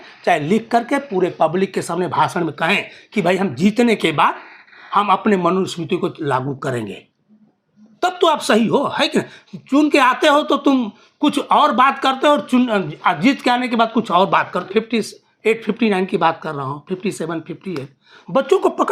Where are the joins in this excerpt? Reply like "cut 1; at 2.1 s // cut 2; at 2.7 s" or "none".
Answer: cut 1; at 14.6 s